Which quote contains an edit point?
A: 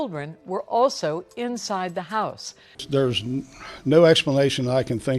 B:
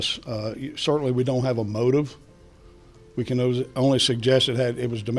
A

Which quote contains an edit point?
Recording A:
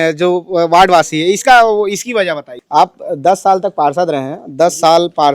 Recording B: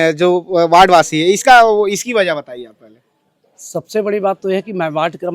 A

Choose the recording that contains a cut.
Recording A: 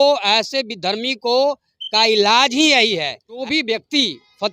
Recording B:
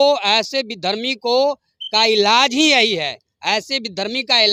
A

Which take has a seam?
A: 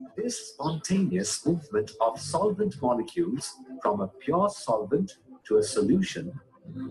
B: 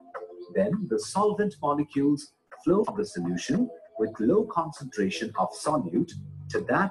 B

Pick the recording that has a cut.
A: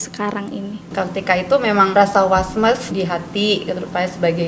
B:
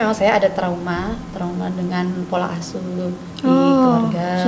A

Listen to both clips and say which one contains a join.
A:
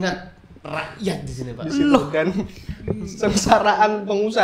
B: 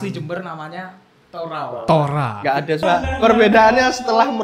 B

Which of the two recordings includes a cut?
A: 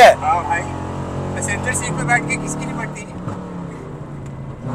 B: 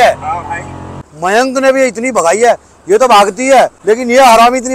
B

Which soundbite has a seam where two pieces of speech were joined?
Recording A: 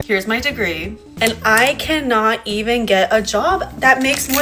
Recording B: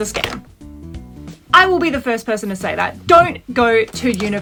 A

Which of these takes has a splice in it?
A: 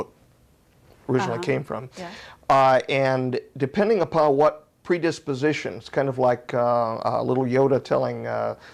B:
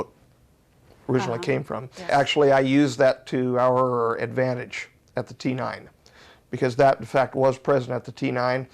B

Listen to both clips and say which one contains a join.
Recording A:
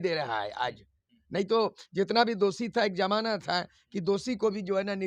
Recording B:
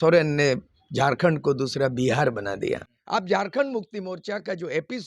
B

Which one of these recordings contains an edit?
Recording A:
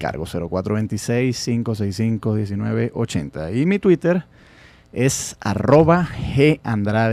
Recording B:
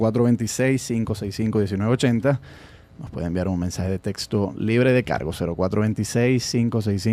B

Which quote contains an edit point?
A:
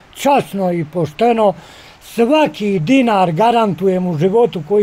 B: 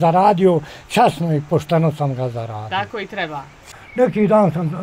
B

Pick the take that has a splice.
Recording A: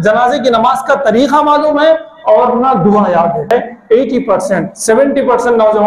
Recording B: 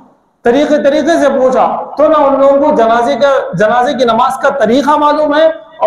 A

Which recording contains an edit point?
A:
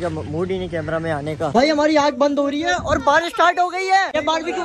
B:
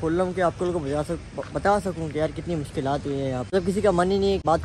A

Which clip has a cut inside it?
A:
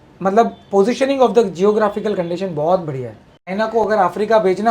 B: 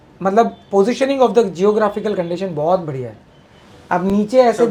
A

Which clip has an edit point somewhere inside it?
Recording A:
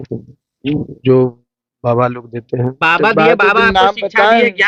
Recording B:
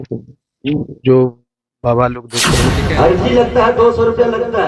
B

